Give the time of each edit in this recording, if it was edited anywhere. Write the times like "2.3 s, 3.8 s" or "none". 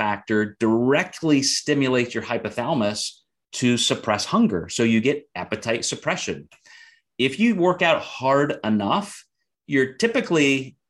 none